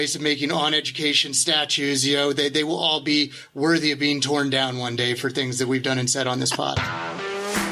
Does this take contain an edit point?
yes; 1 cut; at 6.8 s

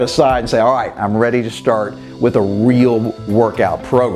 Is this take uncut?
yes; 0 cuts

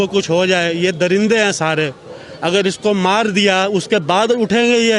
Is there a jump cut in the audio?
no; 0 cuts

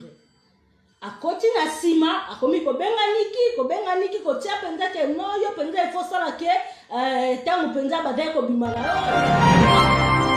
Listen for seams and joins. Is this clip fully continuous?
no; 1 cut; at 9.0 s

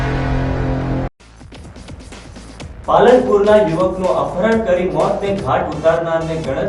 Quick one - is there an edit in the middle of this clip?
yes; 1 cut; at 0.9 s

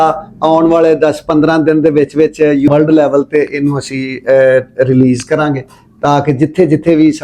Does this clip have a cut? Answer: yes; 1 cut; at 2.7 s

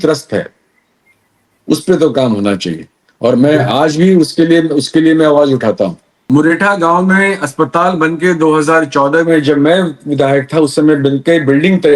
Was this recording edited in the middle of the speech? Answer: yes; 1 cut; at 6.1 s

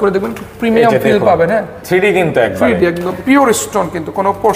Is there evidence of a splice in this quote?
yes; 1 cut; at 3.2 s

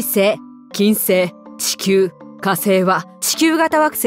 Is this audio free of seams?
no; 1 cut; at 3.2 s

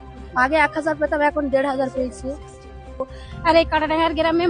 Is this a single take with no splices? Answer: no; 1 cut; at 2.9 s

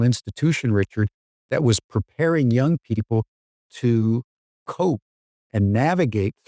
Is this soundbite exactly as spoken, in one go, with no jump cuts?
yes; 0 cuts

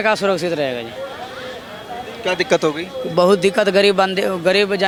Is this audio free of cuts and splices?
yes; 0 cuts

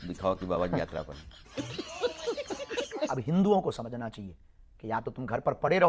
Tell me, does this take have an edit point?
yes; 1 cut; at 2.9 s

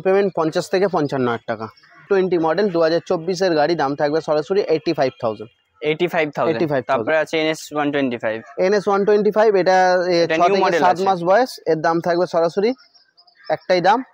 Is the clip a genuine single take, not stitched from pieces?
no; 1 cut; at 2.1 s

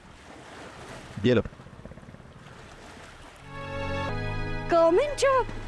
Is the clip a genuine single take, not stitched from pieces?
no; 1 cut; at 4.1 s

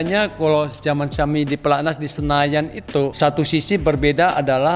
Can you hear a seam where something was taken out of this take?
yes; 1 cut; at 3.1 s

